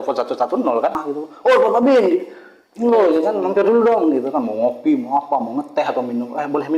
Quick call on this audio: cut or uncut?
cut